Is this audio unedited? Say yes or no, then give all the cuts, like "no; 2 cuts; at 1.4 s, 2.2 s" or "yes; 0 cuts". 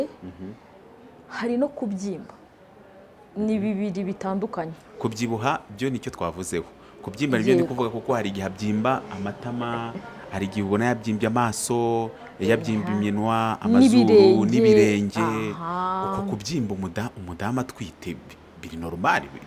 yes; 0 cuts